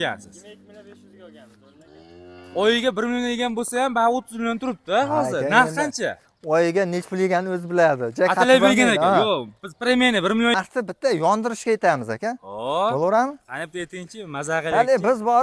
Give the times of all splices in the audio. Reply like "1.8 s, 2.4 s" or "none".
10.5 s